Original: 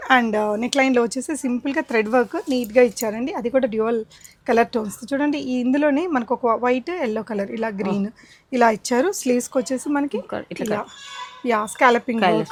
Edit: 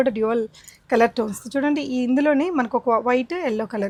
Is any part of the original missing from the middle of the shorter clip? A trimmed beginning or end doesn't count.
no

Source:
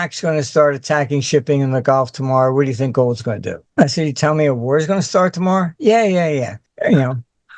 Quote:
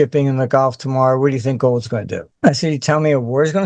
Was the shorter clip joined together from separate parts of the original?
no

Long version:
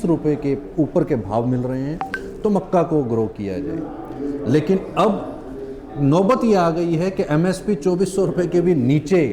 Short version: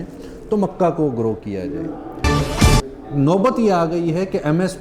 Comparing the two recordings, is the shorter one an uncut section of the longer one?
no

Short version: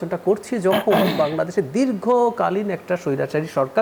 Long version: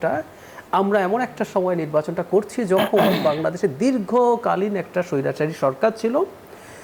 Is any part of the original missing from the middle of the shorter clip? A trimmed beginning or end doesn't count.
no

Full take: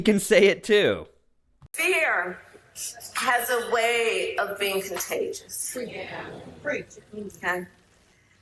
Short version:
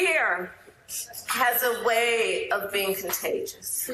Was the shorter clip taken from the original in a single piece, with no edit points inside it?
yes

